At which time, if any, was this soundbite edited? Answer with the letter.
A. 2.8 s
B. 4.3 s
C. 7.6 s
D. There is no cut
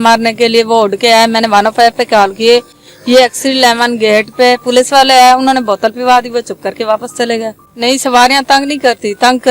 C